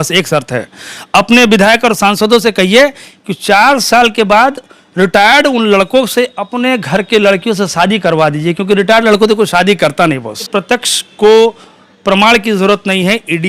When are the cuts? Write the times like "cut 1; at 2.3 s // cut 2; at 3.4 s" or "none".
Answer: cut 1; at 10.5 s